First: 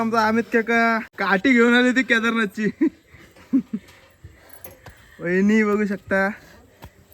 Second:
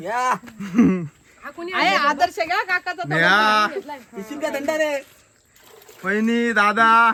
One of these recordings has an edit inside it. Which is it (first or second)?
first